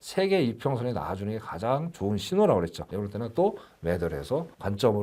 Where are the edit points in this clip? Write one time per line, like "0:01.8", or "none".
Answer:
0:02.8